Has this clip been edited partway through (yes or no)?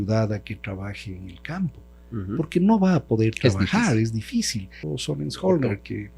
yes